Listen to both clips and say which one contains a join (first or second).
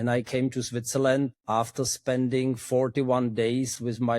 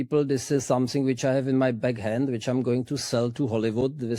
first